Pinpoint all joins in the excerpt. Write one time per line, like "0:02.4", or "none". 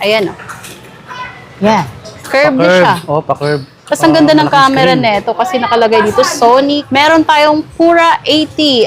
0:06.8